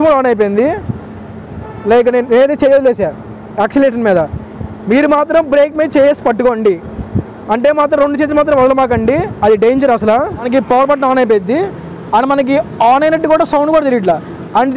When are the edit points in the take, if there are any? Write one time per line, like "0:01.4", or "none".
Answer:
0:10.4